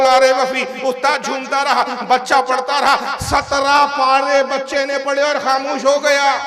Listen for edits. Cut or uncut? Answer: uncut